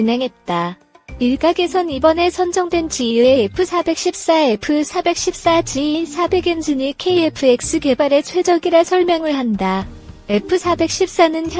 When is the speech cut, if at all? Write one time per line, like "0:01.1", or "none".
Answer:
none